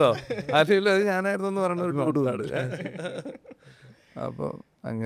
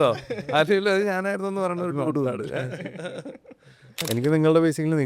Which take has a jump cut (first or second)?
second